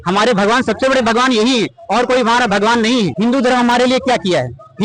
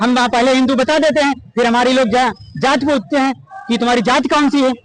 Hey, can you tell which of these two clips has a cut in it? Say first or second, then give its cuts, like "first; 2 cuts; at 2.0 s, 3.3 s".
first; 1 cut; at 3.1 s